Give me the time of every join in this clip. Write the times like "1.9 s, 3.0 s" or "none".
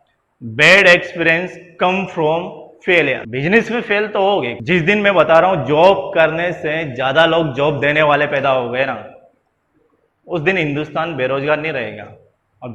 3.3 s, 4.5 s